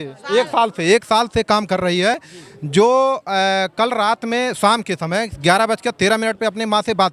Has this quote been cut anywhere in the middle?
no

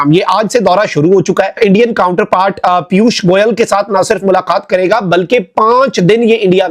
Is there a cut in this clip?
yes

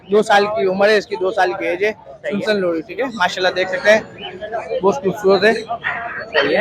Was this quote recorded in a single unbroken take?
yes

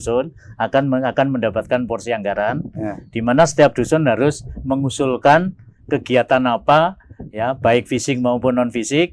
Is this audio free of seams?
yes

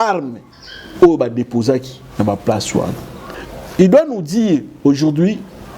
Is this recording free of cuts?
no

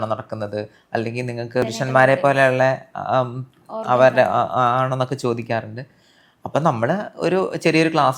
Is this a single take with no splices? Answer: yes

